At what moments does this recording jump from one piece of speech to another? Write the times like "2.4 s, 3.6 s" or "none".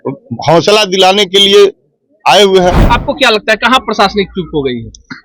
2.8 s